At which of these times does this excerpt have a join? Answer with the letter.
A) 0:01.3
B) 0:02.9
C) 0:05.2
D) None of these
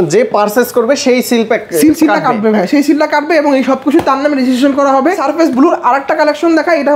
C